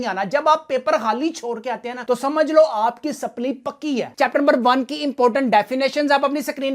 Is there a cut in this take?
no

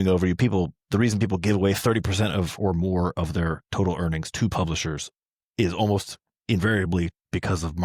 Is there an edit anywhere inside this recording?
no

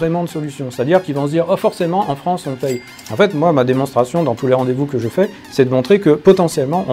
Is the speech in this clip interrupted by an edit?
no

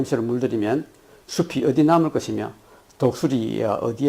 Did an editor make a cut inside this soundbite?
yes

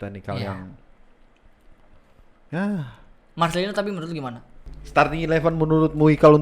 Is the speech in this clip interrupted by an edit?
yes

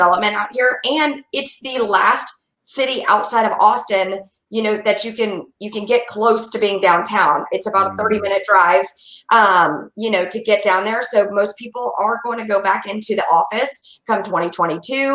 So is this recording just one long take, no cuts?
yes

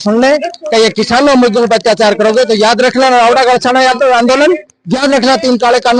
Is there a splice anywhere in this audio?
no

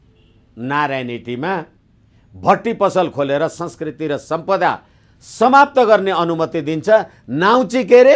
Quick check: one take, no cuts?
yes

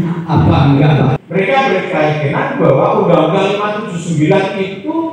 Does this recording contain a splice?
yes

